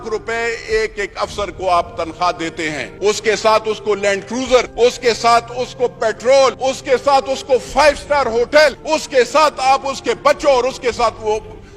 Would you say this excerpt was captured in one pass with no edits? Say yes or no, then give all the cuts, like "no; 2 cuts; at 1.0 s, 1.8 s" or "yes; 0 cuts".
no; 4 cuts; at 2.8 s, 4.7 s, 6.6 s, 8.8 s